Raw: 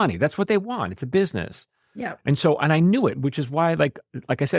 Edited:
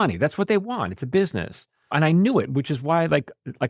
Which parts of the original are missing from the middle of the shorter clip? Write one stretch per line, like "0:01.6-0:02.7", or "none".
0:01.9-0:02.6